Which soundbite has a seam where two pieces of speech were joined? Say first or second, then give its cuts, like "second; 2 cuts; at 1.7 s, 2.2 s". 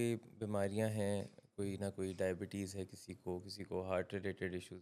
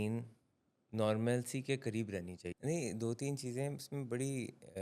second; 1 cut; at 2.4 s